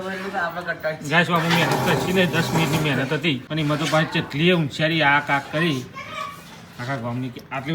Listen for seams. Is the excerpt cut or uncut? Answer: cut